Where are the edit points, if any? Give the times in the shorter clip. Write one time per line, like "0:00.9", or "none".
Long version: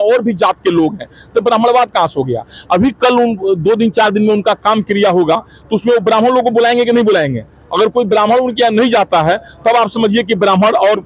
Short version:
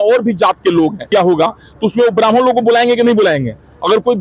0:01.1